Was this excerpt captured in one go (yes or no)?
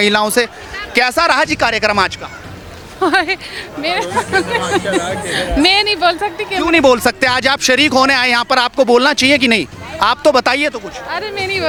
yes